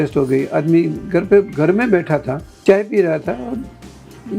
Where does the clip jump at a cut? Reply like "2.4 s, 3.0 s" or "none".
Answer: 2.4 s